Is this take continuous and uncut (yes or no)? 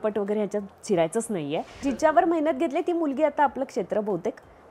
no